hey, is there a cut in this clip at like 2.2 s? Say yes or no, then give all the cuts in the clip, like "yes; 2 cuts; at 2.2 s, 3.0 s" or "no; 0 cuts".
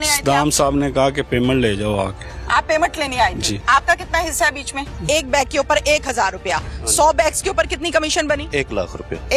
no; 1 cut; at 5.0 s